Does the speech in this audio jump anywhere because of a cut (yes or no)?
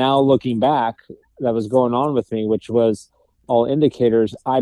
no